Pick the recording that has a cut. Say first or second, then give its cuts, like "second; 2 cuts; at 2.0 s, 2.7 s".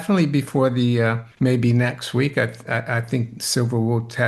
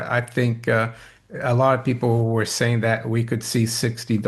first; 1 cut; at 1.3 s